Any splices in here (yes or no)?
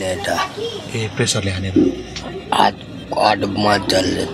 no